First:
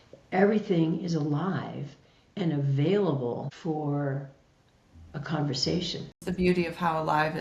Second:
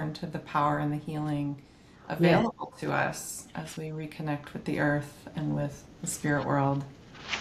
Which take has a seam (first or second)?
first